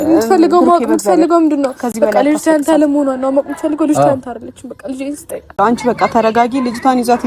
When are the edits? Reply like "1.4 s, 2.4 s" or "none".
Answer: 5.5 s